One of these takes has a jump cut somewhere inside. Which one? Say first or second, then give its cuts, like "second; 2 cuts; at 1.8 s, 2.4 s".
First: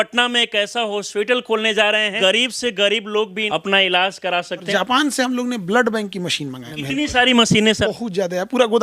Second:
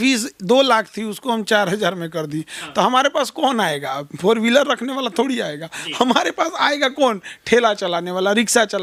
first; 6 cuts; at 1.1 s, 2.1 s, 3.4 s, 4.7 s, 6.7 s, 7.8 s